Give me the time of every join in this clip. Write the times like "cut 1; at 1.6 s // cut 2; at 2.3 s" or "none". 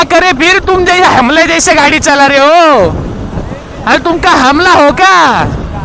none